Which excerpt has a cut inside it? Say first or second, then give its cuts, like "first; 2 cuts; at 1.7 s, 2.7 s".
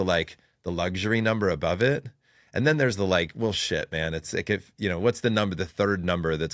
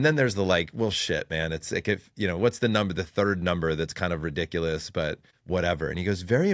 second; 1 cut; at 5.3 s